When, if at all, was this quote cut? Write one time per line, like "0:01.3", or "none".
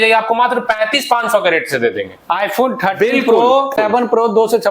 0:03.8